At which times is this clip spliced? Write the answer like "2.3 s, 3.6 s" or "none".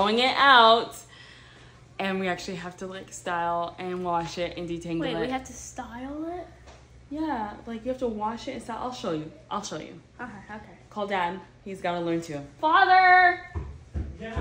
none